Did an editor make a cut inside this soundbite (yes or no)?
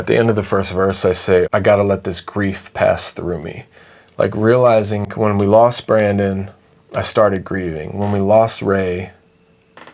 yes